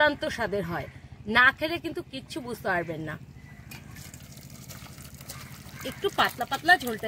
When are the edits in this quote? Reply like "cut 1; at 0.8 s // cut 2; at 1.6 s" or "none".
cut 1; at 3.8 s